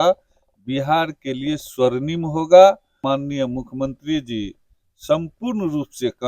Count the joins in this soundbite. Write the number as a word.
one